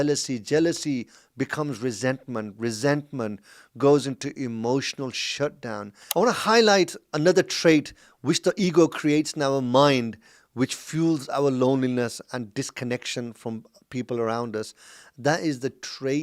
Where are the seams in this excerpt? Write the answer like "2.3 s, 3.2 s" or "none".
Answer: 6.1 s